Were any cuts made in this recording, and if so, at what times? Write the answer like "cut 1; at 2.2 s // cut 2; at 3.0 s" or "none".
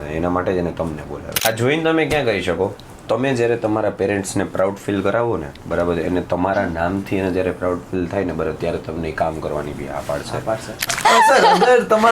cut 1; at 1.2 s // cut 2; at 10.8 s